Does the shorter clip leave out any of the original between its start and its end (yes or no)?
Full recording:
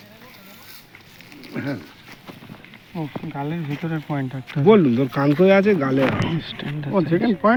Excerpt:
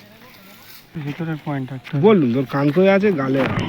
yes